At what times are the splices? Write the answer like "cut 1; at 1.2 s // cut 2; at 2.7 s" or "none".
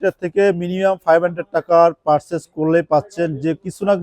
none

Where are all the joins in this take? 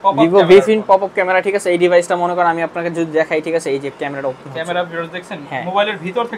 none

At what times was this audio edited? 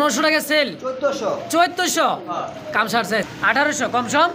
cut 1; at 3.3 s

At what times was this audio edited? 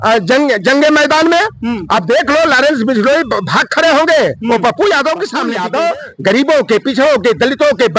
cut 1; at 5.5 s

